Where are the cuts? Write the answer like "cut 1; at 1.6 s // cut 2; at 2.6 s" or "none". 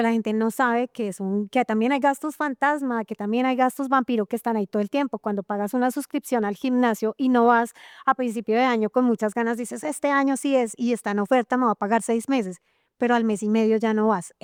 none